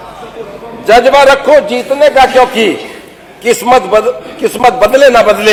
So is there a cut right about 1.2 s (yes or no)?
no